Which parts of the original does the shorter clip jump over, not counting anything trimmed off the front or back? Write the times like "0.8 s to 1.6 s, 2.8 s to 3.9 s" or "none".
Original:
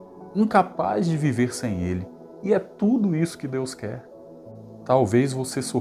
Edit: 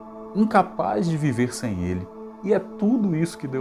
none